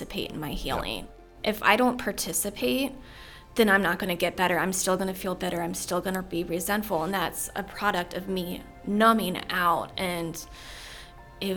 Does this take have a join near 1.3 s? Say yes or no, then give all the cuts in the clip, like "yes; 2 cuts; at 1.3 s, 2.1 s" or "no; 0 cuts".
yes; 1 cut; at 1.3 s